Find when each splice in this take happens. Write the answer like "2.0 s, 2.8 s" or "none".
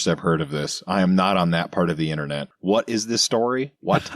2.5 s

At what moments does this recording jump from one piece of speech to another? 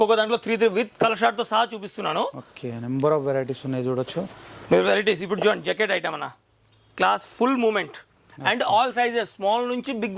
none

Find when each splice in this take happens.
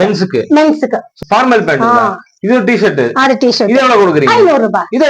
1.1 s

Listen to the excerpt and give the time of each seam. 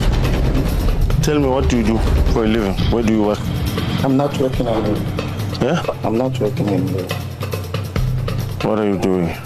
none

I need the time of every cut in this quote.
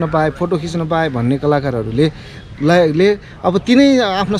none

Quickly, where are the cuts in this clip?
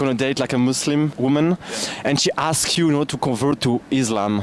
1.1 s

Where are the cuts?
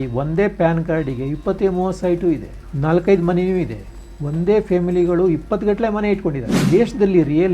6.6 s

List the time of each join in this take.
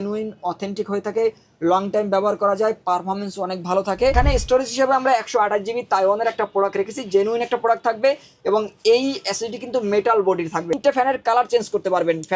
4.1 s, 10.7 s

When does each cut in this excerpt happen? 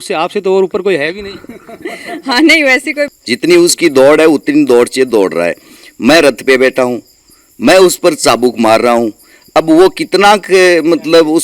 3.1 s

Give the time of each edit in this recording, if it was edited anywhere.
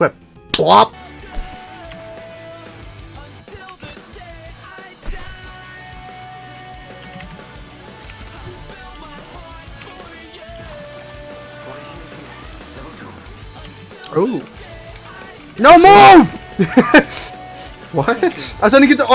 1.0 s

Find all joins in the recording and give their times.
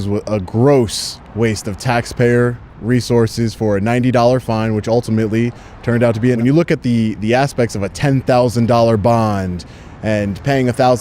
6.4 s

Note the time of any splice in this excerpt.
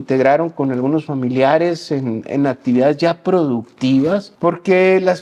4.3 s

